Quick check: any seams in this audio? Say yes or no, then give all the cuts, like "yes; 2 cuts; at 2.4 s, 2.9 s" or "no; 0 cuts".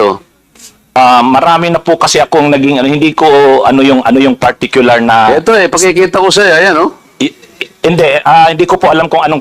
yes; 1 cut; at 1.0 s